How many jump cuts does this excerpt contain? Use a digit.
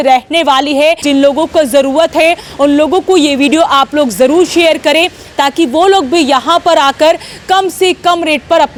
0